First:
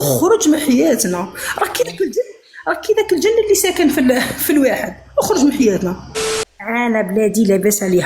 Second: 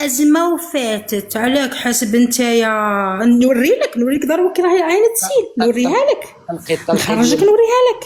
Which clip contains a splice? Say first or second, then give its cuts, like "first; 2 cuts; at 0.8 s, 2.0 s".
first; 1 cut; at 6.3 s